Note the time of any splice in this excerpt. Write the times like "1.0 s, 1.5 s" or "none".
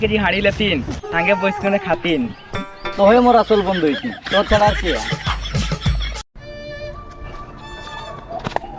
6.4 s